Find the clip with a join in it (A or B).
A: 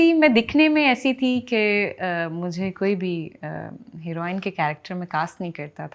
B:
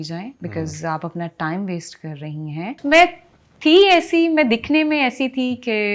B